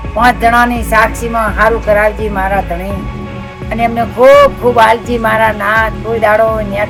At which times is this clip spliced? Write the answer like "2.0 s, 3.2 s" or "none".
none